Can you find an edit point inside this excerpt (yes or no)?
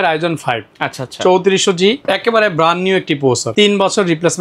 yes